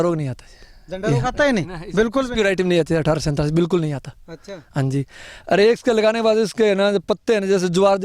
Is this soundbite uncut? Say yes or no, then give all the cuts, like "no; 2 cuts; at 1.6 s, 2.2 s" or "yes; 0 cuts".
yes; 0 cuts